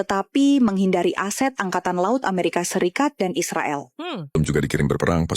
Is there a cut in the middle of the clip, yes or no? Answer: yes